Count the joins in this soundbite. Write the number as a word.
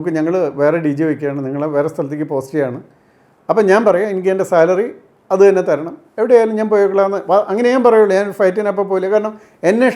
zero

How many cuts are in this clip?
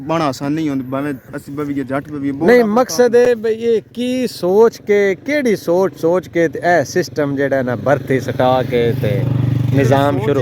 zero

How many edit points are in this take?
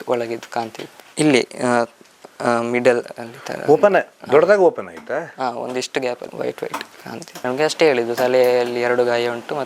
two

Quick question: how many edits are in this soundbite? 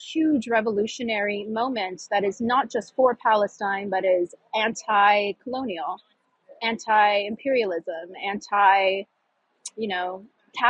zero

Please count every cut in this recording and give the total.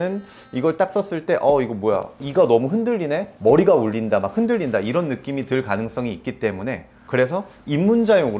one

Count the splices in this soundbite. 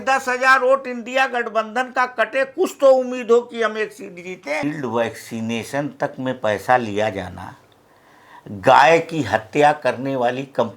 one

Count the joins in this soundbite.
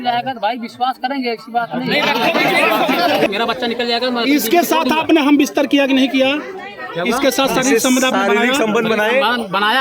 one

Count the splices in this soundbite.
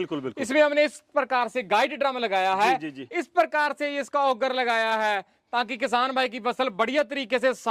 zero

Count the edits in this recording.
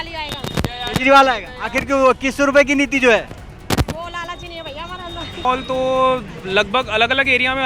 one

